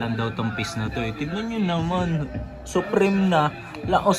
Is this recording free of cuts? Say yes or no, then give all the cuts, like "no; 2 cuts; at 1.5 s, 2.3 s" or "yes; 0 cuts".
yes; 0 cuts